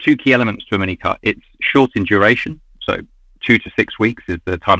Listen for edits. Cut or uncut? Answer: uncut